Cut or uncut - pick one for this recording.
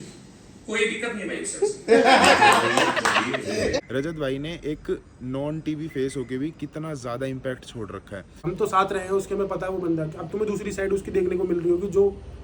cut